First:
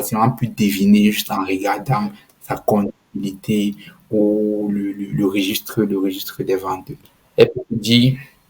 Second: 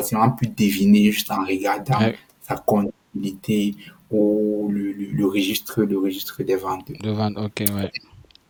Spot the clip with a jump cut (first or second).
first